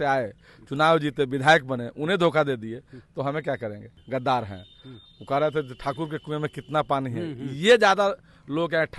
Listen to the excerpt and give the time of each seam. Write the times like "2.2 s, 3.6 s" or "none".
none